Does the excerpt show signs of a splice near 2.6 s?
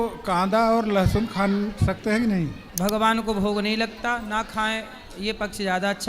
yes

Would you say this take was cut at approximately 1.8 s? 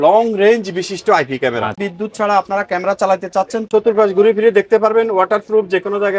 yes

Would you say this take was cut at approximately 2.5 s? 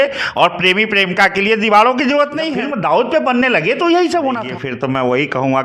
yes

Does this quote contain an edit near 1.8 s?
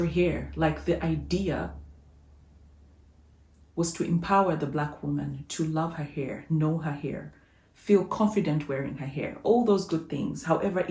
no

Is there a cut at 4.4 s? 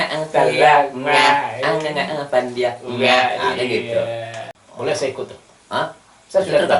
yes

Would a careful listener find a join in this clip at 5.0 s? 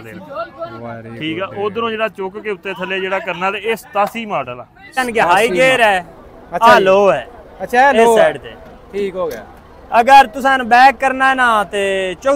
yes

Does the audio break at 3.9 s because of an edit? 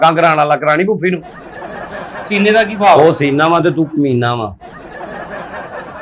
no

